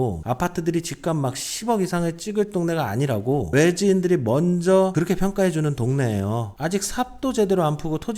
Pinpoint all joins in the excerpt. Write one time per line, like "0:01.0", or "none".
0:06.5